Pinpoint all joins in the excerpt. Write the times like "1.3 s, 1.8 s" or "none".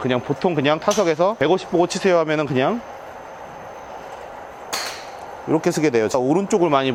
none